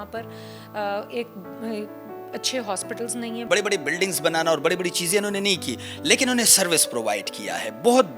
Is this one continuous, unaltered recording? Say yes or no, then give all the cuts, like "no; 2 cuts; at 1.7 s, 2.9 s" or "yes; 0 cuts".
no; 1 cut; at 3.4 s